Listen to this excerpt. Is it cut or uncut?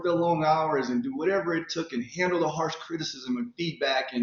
uncut